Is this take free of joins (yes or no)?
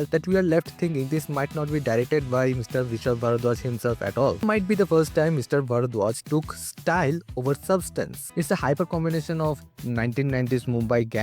no